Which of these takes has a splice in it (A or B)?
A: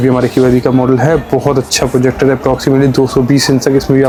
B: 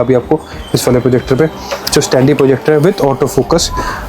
B